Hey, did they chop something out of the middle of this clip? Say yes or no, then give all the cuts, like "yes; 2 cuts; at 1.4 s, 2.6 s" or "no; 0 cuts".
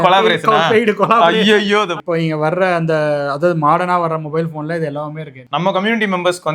yes; 2 cuts; at 2.0 s, 5.4 s